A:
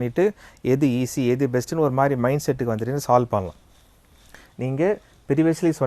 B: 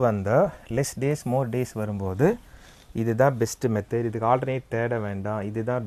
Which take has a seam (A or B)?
A